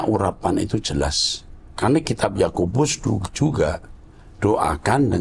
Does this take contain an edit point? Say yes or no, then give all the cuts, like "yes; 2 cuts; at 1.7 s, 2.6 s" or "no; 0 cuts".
no; 0 cuts